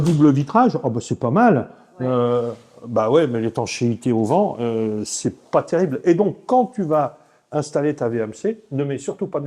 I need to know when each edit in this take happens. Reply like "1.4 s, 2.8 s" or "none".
none